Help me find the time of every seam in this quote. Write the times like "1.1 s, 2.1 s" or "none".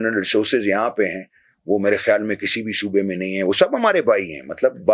none

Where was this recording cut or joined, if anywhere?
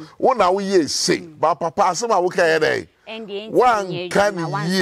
none

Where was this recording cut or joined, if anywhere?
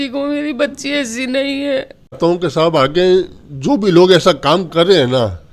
2.2 s

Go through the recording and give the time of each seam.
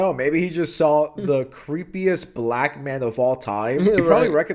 none

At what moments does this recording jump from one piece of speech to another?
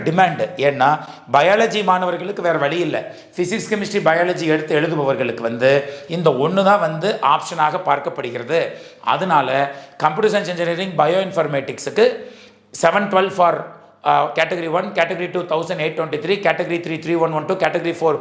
none

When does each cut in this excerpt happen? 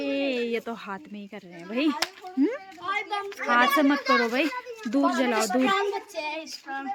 none

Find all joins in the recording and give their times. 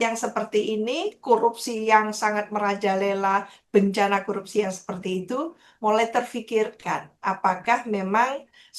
none

